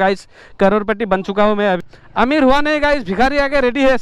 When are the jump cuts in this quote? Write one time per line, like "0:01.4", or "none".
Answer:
0:01.8